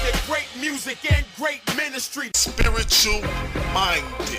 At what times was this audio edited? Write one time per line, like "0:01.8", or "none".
0:01.6